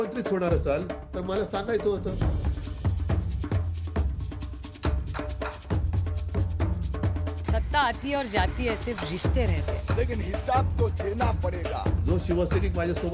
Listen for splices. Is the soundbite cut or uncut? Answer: uncut